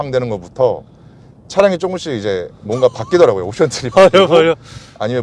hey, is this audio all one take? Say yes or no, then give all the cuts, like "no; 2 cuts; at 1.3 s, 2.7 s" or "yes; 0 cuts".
yes; 0 cuts